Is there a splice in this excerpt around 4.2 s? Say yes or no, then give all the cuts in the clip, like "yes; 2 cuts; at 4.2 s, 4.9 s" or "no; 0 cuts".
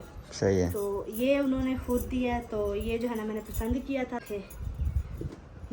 yes; 1 cut; at 4.2 s